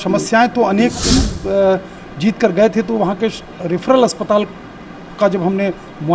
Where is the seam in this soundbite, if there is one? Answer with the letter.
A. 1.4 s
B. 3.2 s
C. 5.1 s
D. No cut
A